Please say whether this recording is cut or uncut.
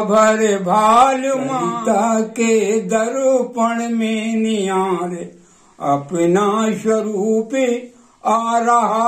uncut